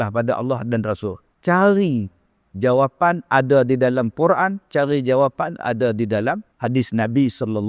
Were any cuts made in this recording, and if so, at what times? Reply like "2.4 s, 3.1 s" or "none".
1.3 s, 6.5 s